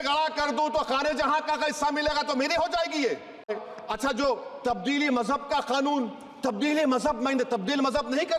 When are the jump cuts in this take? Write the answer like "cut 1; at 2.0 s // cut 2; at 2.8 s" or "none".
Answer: cut 1; at 3.5 s